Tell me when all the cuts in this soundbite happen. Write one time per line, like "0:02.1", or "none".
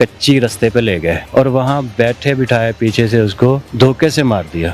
0:01.2
0:03.7